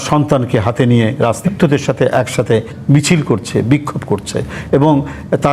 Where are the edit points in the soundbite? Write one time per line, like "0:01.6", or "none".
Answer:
0:01.5